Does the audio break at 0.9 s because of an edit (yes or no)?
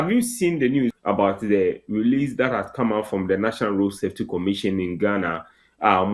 yes